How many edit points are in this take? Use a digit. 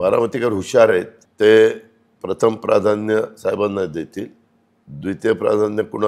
1